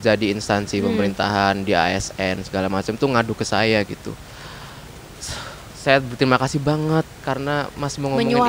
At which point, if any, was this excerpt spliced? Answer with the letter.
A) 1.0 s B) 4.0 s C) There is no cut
C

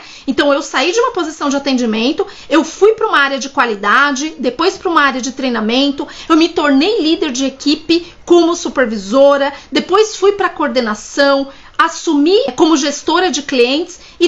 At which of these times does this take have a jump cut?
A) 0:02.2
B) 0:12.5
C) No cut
B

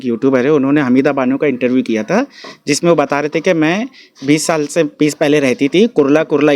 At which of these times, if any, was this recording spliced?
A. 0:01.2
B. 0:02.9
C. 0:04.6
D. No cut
D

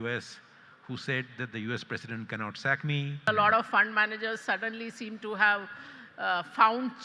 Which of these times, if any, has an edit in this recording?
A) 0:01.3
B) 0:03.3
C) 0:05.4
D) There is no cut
B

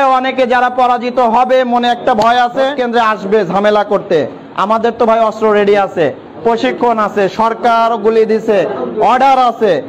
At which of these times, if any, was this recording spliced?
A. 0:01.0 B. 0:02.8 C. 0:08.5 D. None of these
B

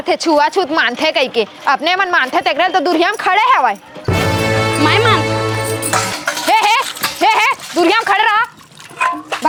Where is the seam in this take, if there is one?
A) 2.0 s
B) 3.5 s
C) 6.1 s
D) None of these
D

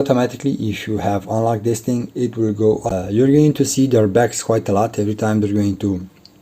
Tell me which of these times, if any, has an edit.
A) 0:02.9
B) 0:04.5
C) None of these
A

